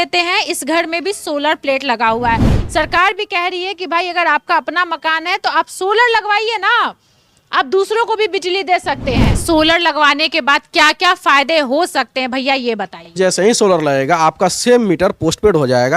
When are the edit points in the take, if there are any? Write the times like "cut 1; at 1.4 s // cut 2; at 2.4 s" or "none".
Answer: cut 1; at 2.6 s // cut 2; at 9.3 s // cut 3; at 13.2 s